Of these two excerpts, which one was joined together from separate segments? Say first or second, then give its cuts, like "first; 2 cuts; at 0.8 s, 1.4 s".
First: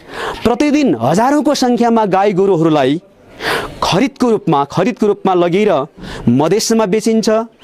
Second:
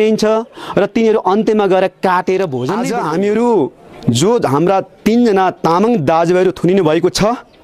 second; 1 cut; at 2.8 s